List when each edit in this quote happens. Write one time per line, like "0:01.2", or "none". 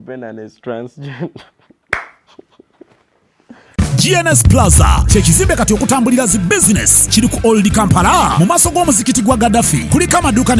0:03.7